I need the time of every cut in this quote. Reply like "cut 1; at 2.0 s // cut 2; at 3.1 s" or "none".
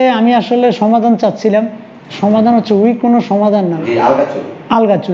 cut 1; at 3.8 s